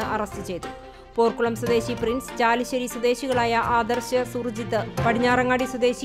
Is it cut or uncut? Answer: uncut